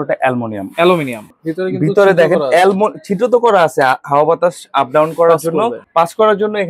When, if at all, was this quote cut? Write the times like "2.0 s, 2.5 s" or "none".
1.2 s, 4.0 s, 5.8 s